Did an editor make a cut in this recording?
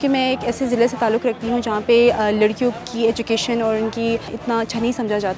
yes; 1 cut; at 4.3 s

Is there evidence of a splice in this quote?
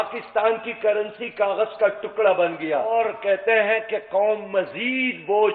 yes; 1 cut; at 2.9 s

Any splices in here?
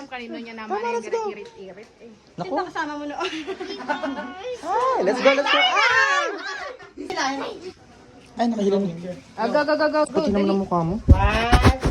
yes; 1 cut; at 6.9 s

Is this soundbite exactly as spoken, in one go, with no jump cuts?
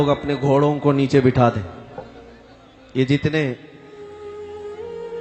yes; 0 cuts

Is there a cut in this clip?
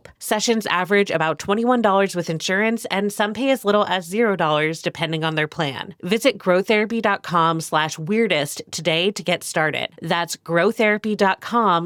no; 0 cuts

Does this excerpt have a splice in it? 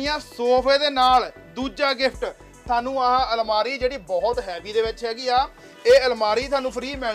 no; 0 cuts

